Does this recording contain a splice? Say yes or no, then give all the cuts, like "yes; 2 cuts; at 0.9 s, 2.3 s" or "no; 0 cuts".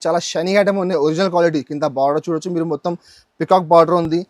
no; 0 cuts